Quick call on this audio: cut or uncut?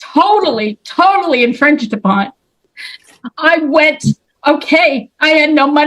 uncut